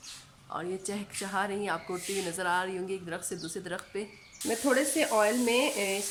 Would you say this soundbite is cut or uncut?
uncut